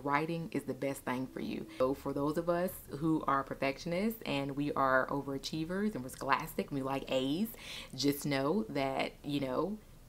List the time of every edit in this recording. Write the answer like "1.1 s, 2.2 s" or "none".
1.8 s